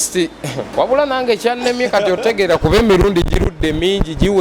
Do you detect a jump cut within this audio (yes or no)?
no